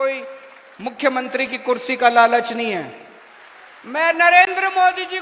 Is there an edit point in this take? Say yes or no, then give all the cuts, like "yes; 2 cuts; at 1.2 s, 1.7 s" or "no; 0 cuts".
yes; 1 cut; at 3.0 s